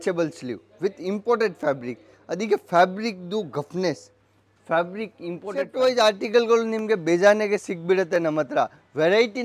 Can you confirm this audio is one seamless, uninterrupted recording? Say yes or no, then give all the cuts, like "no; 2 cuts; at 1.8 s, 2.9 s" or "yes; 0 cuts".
no; 1 cut; at 5.7 s